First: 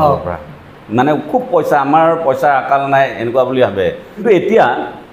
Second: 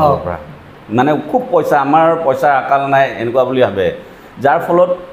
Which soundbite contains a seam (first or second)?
first